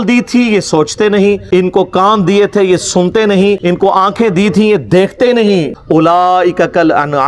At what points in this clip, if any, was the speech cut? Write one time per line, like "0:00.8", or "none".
0:01.4
0:03.6
0:05.8